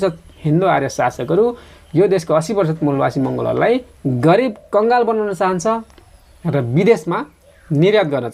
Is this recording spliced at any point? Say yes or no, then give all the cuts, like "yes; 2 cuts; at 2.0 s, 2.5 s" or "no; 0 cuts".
no; 0 cuts